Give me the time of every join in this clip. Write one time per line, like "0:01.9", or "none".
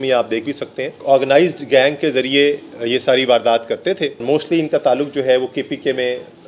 0:01.0
0:04.2